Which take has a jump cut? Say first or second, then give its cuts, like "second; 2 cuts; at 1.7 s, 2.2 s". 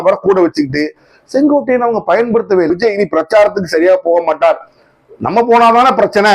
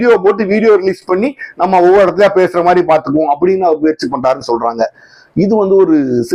first; 1 cut; at 2.7 s